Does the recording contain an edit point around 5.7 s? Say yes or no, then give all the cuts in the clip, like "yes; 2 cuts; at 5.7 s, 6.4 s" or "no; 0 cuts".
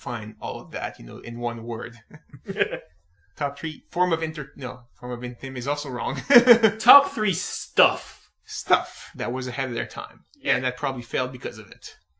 yes; 1 cut; at 5.7 s